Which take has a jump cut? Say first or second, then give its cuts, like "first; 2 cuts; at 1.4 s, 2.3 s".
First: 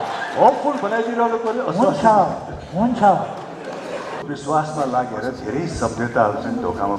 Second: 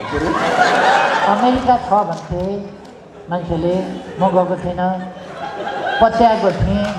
first; 1 cut; at 4.2 s